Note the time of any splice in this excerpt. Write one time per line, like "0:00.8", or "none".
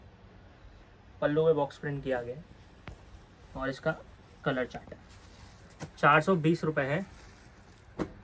none